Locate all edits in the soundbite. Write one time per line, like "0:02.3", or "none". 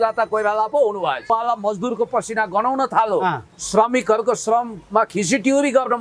0:01.3